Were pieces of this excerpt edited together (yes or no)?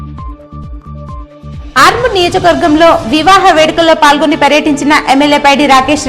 yes